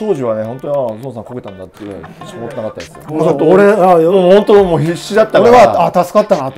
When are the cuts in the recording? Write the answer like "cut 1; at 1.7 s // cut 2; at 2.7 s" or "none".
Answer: none